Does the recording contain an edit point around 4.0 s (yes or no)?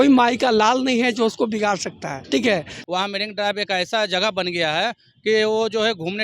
no